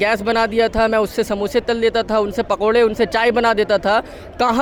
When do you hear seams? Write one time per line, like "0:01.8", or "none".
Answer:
none